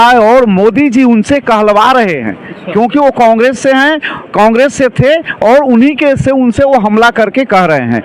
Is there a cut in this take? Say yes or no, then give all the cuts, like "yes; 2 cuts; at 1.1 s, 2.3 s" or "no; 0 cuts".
no; 0 cuts